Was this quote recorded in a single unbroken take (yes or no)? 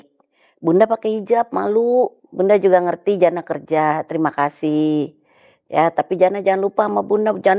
no